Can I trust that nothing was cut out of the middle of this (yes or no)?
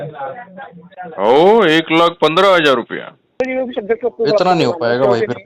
no